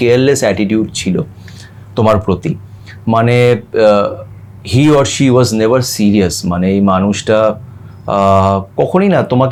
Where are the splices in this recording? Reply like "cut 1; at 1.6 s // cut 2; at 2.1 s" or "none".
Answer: none